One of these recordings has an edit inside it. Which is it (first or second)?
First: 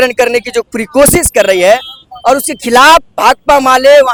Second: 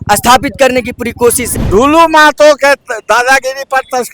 second